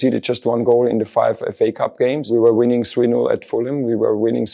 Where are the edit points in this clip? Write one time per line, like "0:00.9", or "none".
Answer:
0:02.3